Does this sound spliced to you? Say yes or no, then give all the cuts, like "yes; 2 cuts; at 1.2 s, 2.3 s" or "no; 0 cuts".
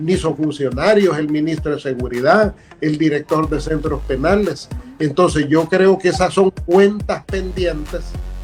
no; 0 cuts